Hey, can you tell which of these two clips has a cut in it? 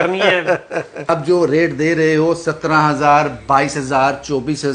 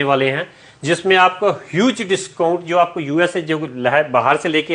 first; 1 cut; at 1.1 s

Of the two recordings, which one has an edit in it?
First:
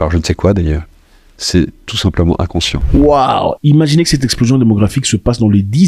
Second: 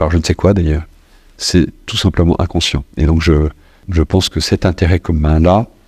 second; 1 cut; at 2.8 s

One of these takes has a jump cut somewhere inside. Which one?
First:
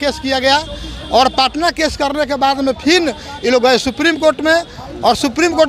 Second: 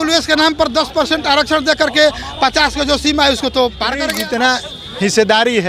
second; 1 cut; at 4.1 s

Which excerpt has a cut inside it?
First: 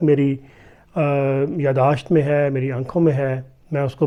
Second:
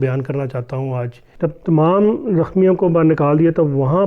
second; 1 cut; at 1.2 s

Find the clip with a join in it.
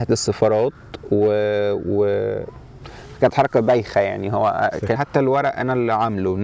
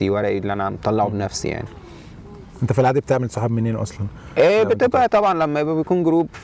first; 1 cut; at 5.0 s

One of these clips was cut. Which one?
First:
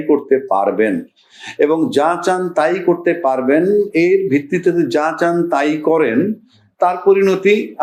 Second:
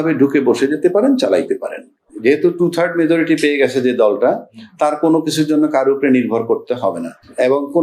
second; 1 cut; at 2.1 s

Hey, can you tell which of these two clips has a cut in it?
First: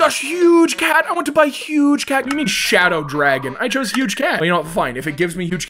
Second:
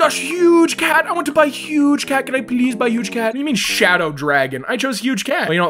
first; 1 cut; at 2.3 s

